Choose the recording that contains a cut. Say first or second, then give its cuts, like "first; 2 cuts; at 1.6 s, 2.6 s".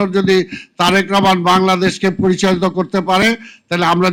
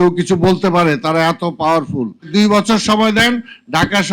second; 1 cut; at 2.3 s